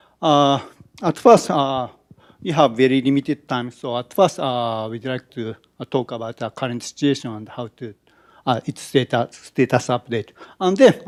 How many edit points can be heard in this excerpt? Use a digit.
0